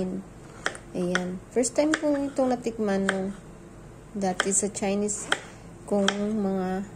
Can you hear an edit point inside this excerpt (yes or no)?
no